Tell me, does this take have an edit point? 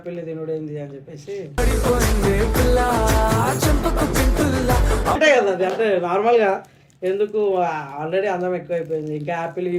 no; 0 cuts

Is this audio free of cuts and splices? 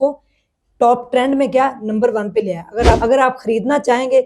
no; 1 cut; at 3.0 s

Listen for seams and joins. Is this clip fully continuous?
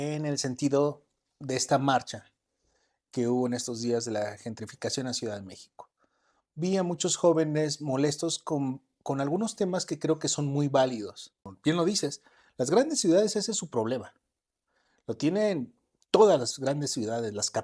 no; 1 cut; at 11.5 s

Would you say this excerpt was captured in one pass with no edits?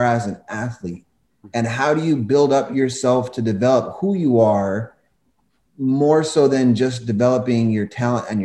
yes; 0 cuts

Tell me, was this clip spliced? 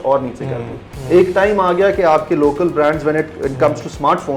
no; 0 cuts

